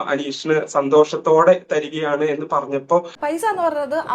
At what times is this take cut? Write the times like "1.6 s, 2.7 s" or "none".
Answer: 3.2 s

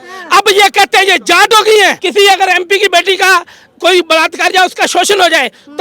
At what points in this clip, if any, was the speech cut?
2.0 s

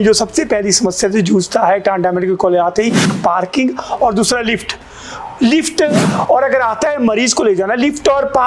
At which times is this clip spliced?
3.1 s, 6.1 s

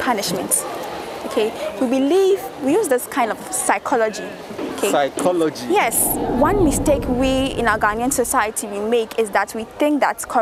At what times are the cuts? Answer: 6.1 s

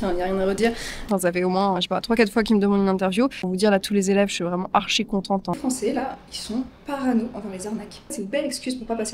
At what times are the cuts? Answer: 1.1 s, 3.5 s, 5.6 s, 8.1 s

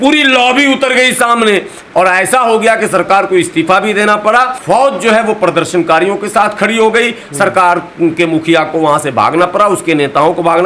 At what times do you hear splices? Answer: none

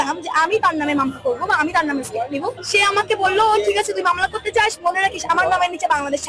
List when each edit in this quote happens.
2.6 s

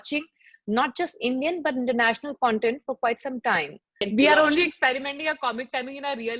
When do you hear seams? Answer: 4.0 s

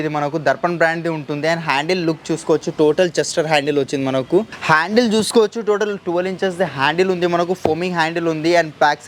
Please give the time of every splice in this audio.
4.5 s

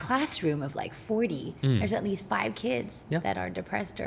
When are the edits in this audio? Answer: none

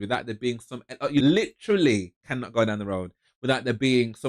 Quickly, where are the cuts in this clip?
1.2 s

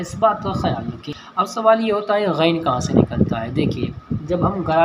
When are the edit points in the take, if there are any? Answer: 1.1 s

